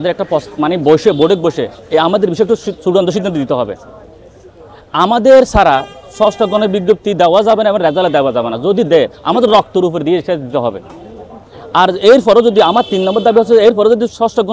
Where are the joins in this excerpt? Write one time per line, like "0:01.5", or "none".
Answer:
none